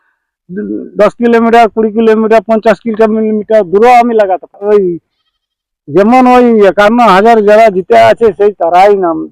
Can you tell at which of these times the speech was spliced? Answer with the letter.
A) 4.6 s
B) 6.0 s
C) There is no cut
A